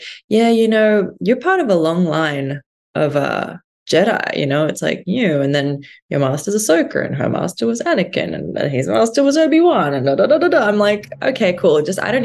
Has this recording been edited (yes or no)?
no